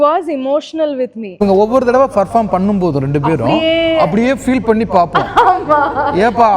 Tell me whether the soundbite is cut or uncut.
cut